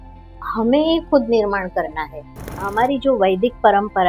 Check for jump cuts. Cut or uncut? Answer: cut